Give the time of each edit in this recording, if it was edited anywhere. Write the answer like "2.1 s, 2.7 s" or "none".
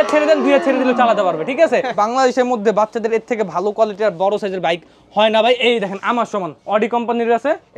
1.9 s, 6.5 s